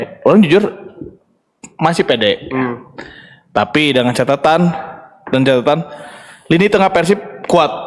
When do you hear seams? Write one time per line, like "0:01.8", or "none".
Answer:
none